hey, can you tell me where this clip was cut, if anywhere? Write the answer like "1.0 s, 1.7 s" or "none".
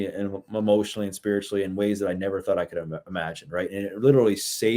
none